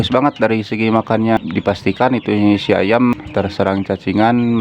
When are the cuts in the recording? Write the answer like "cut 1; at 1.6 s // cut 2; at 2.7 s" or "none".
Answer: cut 1; at 1.4 s // cut 2; at 3.2 s